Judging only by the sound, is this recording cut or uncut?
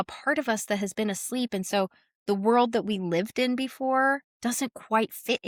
uncut